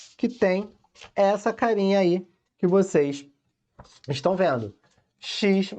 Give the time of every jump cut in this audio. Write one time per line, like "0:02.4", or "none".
none